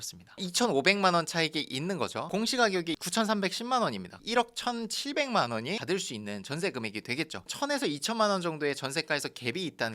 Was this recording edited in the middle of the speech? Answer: yes; 3 cuts; at 2.3 s, 4.2 s, 7.4 s

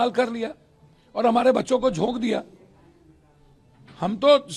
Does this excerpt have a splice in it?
no; 0 cuts

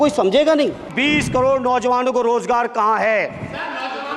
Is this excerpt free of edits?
no; 1 cut; at 0.9 s

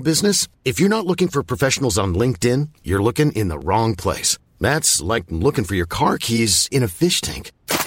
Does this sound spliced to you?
no; 0 cuts

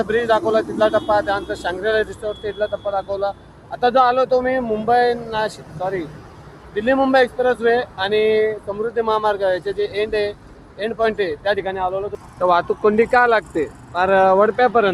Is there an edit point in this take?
yes; 1 cut; at 12.1 s

